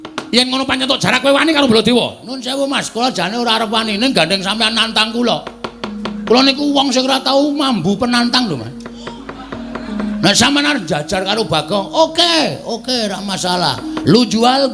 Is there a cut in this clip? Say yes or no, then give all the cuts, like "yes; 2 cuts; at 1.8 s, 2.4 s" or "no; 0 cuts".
no; 0 cuts